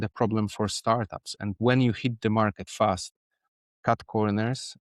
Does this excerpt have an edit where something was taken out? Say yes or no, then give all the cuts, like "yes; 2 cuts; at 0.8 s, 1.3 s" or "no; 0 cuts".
no; 0 cuts